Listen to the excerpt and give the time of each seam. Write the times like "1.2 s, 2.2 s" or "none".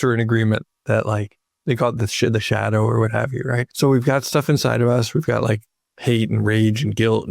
3.7 s